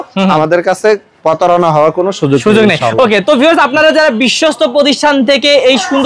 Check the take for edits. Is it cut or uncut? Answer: uncut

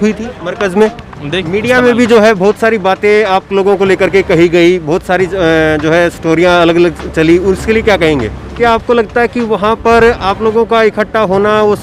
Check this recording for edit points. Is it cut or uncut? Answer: cut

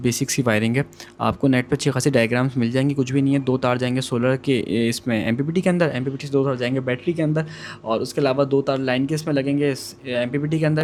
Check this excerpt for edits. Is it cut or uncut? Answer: uncut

